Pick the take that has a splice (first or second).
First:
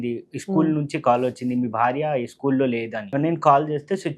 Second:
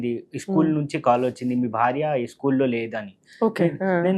first